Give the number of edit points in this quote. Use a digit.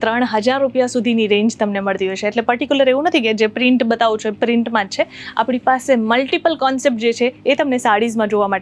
0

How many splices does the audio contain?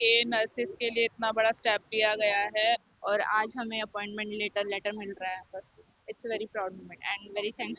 1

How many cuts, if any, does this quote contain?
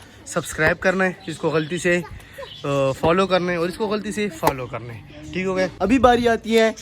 1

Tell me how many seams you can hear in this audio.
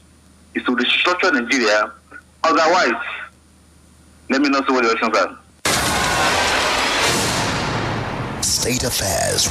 0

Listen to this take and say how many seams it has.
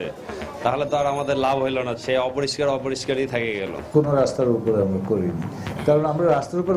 1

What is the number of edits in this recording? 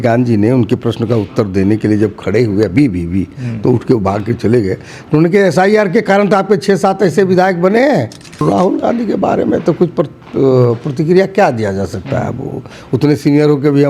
1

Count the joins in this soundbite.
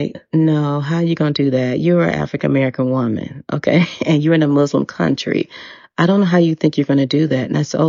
0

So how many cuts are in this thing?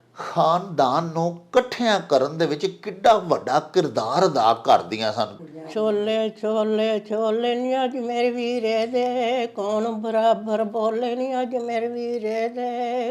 1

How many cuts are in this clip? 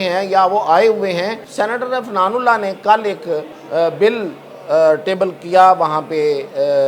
2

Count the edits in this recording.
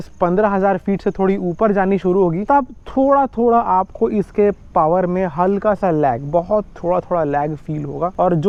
0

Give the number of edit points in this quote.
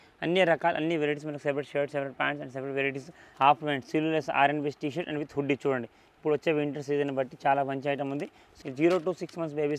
2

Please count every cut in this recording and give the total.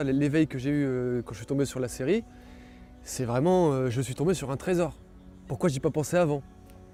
0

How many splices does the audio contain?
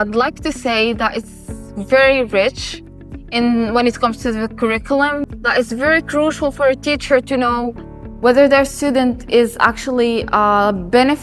1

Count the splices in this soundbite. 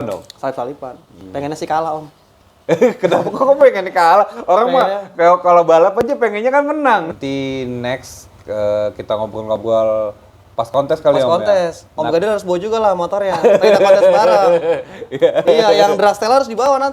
1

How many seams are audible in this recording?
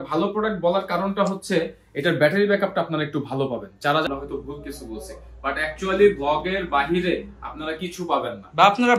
1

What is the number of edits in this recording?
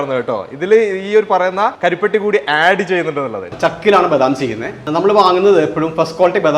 3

